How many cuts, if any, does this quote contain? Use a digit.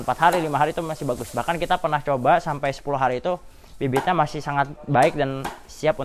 0